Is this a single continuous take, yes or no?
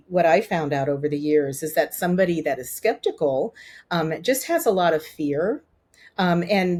yes